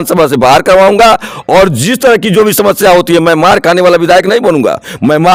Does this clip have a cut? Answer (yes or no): no